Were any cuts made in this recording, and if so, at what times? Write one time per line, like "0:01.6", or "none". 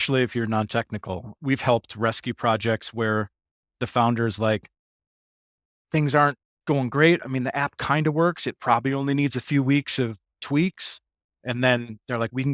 0:01.3
0:07.2
0:10.4
0:11.3